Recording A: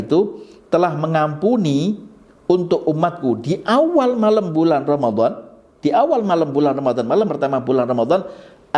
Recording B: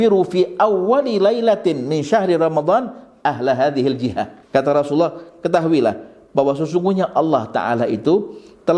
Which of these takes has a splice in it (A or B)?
B